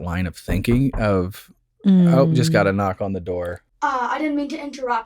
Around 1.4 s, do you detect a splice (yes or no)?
no